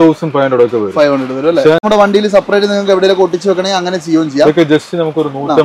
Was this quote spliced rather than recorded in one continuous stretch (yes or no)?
yes